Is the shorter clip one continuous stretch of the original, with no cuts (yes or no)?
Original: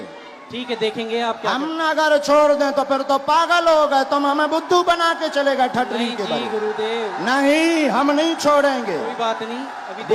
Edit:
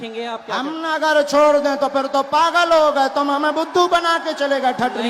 yes